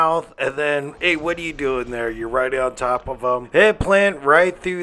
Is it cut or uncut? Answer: uncut